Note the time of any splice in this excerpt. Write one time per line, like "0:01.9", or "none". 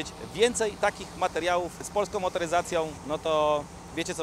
0:01.9
0:03.0

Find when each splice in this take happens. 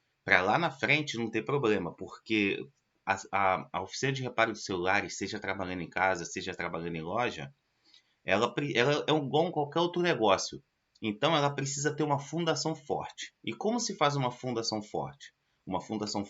none

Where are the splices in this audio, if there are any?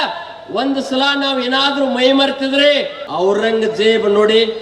0:03.0

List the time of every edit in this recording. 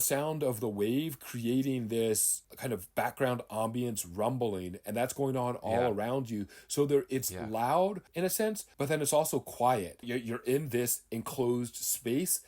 0:08.4
0:10.1

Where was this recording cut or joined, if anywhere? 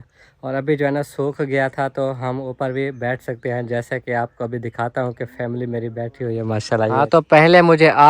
0:06.9

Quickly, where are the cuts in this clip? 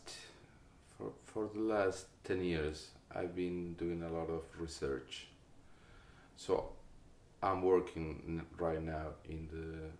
none

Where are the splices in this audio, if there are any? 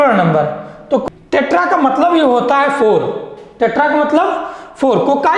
0:01.0

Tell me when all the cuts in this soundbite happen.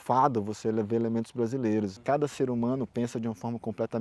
0:02.0

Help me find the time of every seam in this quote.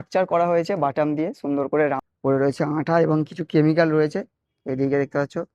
0:02.0

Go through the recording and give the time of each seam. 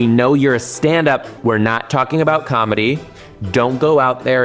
0:01.3

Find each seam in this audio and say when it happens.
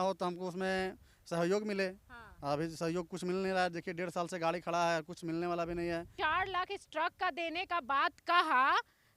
0:06.1

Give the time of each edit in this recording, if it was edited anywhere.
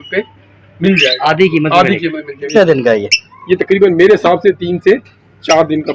0:02.5

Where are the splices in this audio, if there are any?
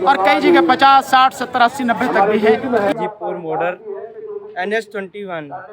0:02.9

